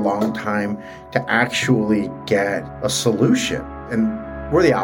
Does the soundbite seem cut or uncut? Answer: cut